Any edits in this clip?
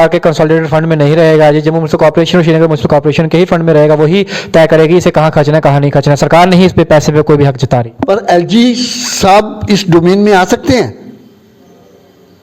no; 0 cuts

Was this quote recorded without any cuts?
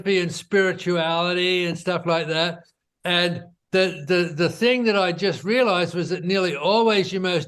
no; 1 cut; at 3.5 s

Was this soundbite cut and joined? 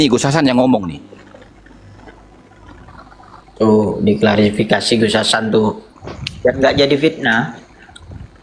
yes; 1 cut; at 3.4 s

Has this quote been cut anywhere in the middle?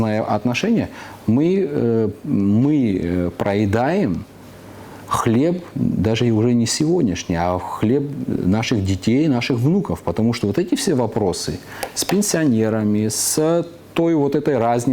no; 0 cuts

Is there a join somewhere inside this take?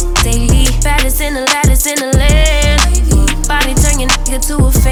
no; 0 cuts

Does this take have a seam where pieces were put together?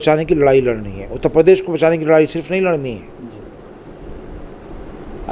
no; 0 cuts

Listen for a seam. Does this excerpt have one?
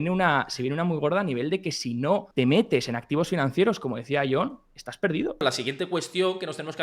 yes; 2 cuts; at 2.3 s, 5.4 s

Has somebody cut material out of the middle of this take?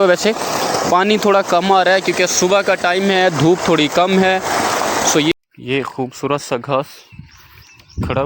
yes; 1 cut; at 5.3 s

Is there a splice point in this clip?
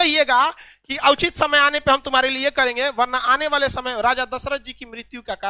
no; 0 cuts

